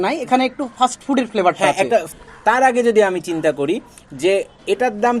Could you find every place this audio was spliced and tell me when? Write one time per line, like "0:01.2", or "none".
0:02.1